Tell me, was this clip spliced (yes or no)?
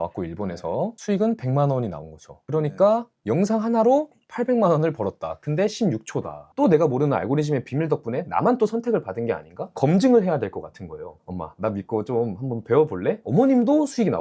yes